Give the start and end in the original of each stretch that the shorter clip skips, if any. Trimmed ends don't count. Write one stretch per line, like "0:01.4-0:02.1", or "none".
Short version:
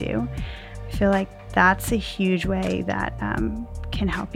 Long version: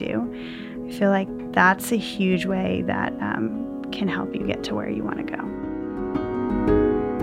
none